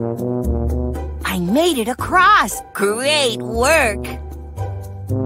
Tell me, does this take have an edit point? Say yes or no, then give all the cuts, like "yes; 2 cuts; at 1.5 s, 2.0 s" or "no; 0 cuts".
yes; 2 cuts; at 1.2 s, 3.9 s